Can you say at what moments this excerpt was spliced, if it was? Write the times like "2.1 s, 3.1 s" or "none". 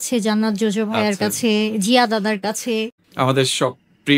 none

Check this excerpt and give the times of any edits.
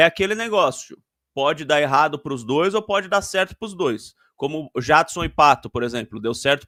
none

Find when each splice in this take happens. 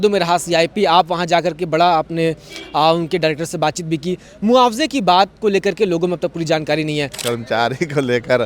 7.1 s

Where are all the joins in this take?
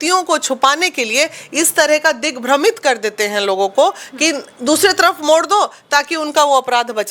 none

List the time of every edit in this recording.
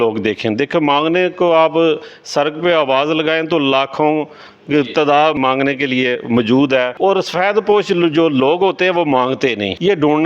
5.4 s, 7.0 s

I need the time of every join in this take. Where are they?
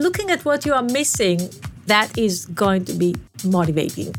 1.9 s, 3.3 s

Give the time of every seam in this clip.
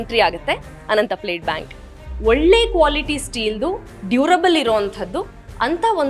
1.9 s

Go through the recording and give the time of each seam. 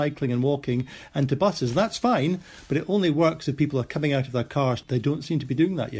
4.8 s

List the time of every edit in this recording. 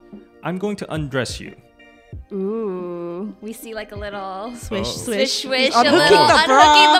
none

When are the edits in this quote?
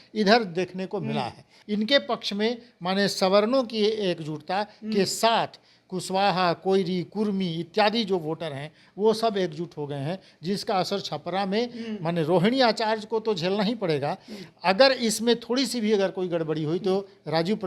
1.5 s

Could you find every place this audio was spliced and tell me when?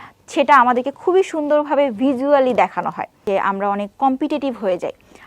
3.2 s

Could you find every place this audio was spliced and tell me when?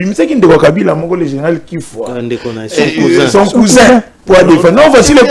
none

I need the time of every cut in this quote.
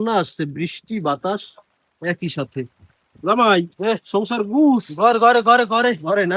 none

